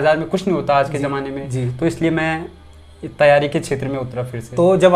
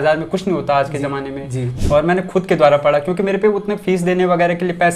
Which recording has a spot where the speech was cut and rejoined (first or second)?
second